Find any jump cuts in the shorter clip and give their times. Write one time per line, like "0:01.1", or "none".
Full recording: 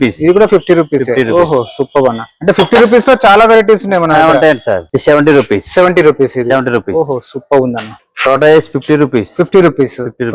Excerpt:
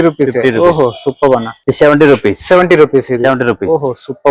0:01.6